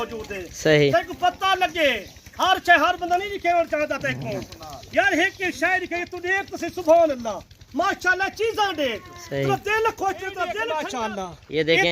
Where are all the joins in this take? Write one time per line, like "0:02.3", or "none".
0:10.8